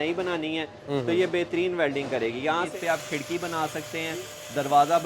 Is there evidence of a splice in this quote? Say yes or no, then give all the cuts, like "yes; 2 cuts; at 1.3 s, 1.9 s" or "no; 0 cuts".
yes; 1 cut; at 2.7 s